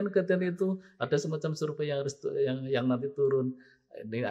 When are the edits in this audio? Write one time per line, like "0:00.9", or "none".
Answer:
none

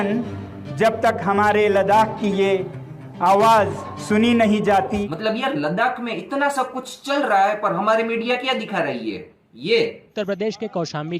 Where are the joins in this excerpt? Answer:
0:05.1

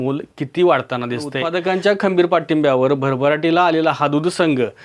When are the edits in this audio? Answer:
0:01.4

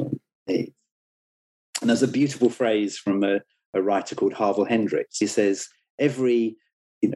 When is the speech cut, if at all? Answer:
0:05.2

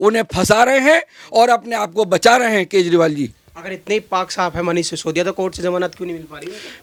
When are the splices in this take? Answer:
none

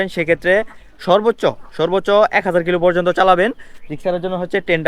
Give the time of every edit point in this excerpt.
none

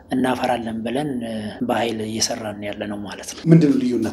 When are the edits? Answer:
0:01.5
0:03.2

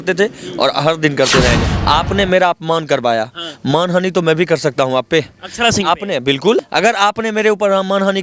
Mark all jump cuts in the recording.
0:01.7
0:06.6

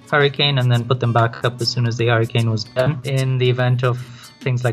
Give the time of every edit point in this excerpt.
0:03.0

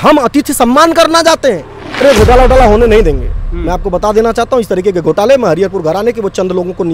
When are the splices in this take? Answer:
0:02.0

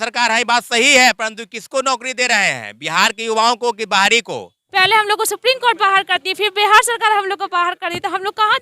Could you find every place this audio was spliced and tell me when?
0:04.6

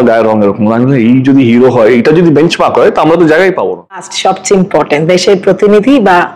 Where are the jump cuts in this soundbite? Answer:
0:04.1

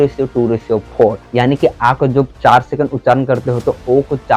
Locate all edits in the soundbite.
none

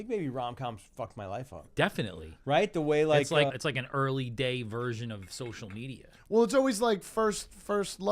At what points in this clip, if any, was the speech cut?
0:01.6
0:03.5

